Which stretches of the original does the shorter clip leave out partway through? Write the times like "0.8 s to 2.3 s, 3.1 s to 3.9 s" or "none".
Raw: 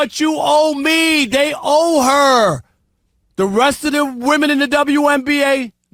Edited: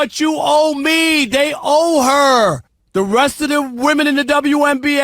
2.7 s to 3.2 s